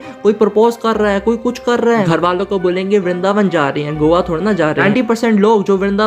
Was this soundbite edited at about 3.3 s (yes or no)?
no